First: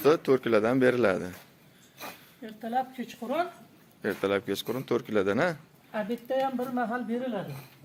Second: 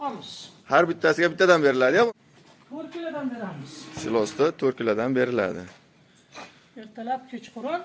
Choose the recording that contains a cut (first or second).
second